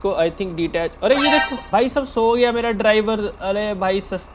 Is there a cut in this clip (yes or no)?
yes